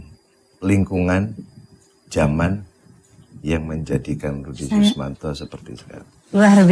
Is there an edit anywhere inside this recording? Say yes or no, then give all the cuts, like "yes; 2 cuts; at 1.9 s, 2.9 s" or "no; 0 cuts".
no; 0 cuts